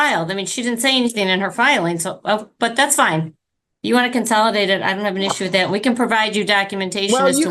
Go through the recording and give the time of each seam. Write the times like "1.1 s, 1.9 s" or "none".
none